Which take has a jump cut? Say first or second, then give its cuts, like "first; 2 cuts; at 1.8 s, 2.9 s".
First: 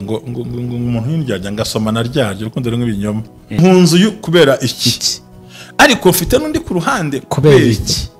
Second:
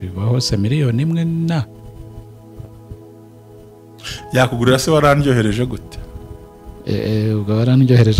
first; 1 cut; at 3.6 s